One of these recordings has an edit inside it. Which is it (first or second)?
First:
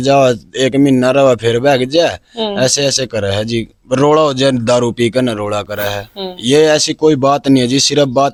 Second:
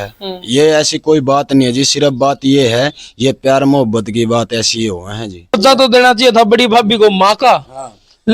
second